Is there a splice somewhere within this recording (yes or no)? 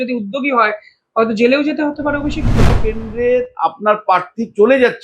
yes